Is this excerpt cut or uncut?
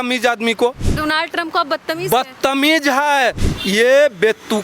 cut